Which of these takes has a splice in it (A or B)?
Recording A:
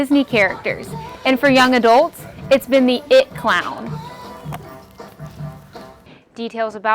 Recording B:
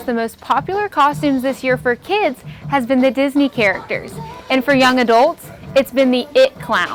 A